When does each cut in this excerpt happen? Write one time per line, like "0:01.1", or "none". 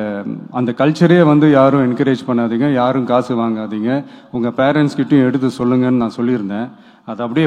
none